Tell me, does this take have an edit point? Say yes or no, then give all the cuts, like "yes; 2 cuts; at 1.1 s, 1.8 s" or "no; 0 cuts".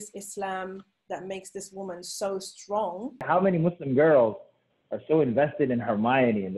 yes; 1 cut; at 3.2 s